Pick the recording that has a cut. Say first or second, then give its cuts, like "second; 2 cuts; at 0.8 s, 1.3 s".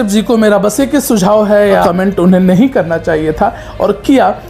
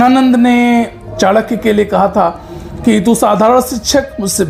first; 1 cut; at 1.8 s